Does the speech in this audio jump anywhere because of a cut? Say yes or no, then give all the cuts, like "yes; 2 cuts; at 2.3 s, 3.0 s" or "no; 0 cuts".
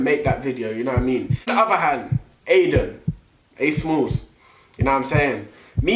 yes; 1 cut; at 1.5 s